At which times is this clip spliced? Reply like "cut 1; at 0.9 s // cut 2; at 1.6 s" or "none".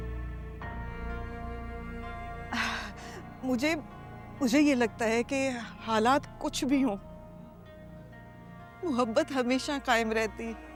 none